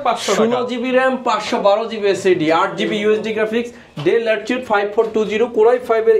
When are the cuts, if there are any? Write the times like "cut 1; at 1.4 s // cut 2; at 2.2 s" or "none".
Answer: none